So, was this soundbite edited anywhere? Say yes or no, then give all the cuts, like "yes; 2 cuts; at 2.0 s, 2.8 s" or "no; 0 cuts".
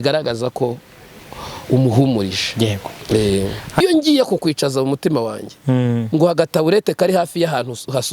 yes; 1 cut; at 3.8 s